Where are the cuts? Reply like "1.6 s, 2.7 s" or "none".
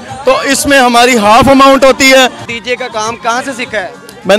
2.4 s